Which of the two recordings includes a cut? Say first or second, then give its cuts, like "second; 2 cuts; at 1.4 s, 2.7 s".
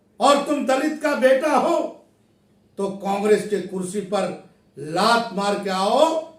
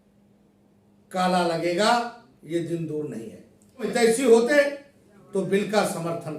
second; 1 cut; at 3.9 s